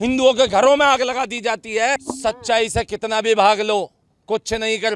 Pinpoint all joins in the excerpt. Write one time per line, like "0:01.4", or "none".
none